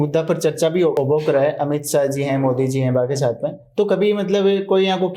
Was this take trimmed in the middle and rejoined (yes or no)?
no